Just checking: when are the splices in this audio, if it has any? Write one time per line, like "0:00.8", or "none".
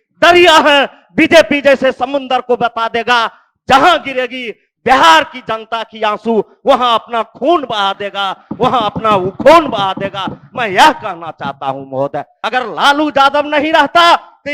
0:12.4